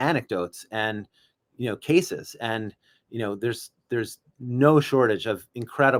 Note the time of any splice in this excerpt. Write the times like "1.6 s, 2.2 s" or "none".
none